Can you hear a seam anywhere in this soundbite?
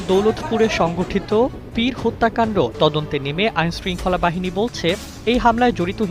yes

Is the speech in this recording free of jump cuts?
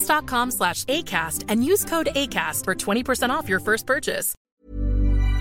no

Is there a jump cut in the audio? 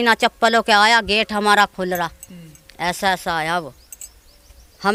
no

